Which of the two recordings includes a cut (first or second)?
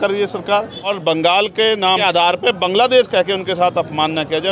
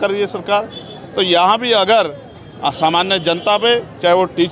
first